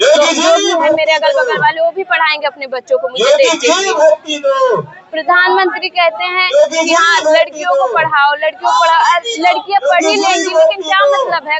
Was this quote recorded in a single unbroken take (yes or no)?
yes